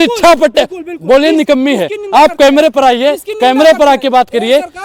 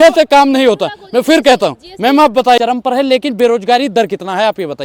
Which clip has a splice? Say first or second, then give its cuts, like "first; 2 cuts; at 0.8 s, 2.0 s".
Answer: second; 1 cut; at 2.6 s